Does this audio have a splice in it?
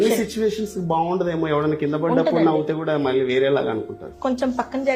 yes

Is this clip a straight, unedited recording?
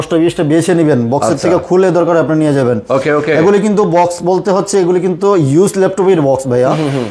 yes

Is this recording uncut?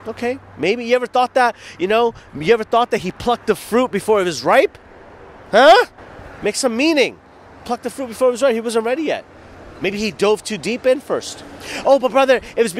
yes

